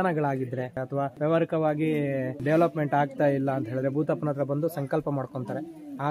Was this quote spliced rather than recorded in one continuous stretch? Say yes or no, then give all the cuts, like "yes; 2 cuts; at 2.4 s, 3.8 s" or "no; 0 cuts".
yes; 2 cuts; at 1.0 s, 2.4 s